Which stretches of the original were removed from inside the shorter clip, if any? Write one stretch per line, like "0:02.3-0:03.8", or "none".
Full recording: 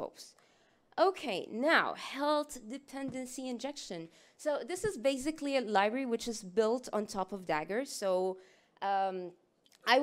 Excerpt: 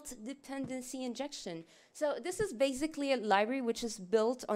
none